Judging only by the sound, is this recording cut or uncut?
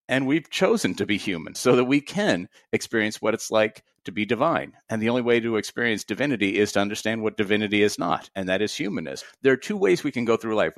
cut